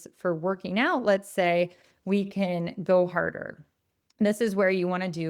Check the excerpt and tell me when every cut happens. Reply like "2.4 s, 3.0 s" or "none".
none